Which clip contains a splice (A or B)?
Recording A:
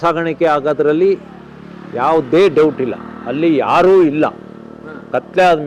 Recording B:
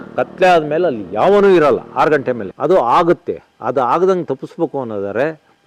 B